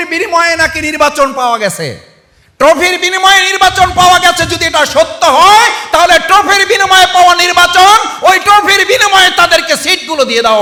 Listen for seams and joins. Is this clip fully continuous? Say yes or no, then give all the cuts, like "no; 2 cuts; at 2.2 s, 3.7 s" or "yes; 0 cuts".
yes; 0 cuts